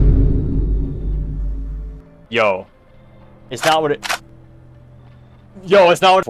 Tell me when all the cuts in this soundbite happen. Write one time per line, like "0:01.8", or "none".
none